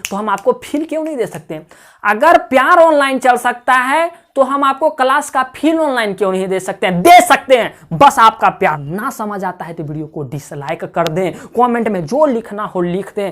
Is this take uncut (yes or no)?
no